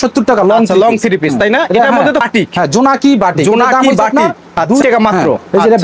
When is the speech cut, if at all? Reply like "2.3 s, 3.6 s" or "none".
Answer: 2.2 s, 4.8 s